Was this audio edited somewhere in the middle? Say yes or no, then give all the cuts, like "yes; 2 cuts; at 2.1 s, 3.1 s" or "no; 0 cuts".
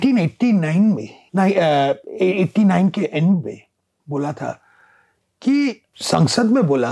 yes; 2 cuts; at 1.2 s, 5.9 s